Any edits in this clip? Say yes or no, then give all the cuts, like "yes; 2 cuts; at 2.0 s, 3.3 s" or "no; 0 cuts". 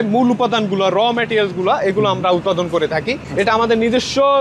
no; 0 cuts